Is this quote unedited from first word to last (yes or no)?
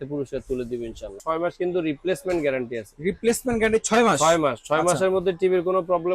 no